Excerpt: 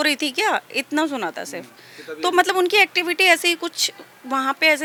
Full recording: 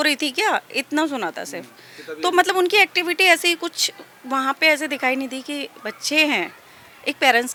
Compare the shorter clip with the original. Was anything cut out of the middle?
no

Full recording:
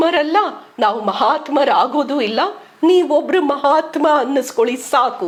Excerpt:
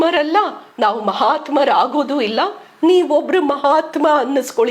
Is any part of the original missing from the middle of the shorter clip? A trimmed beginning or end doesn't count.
no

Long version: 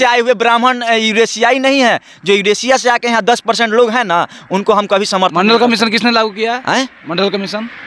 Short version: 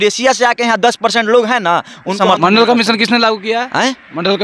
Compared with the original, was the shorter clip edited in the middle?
yes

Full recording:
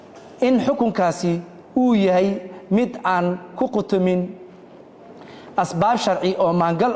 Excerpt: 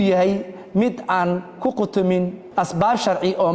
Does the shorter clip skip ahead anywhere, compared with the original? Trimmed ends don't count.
yes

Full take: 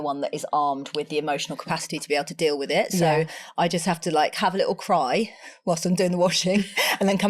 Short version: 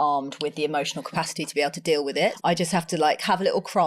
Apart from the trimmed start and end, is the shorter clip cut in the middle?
yes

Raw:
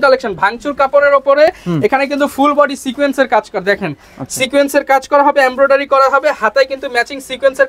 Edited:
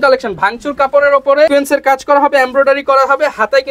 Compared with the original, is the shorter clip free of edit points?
no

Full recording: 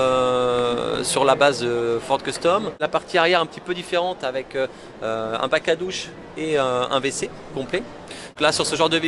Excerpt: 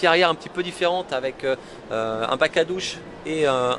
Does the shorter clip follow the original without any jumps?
yes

